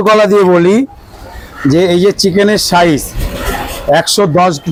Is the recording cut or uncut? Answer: uncut